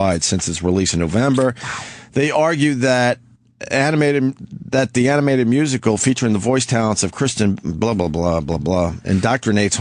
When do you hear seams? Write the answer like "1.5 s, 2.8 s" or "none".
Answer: 7.7 s

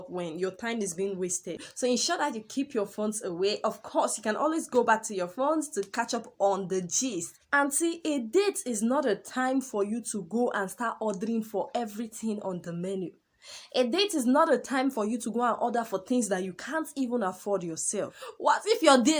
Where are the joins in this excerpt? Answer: 1.7 s, 7.4 s, 18.2 s

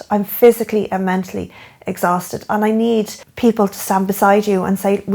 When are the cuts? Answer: 3.2 s

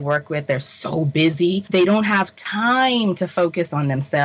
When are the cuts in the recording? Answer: 1.6 s

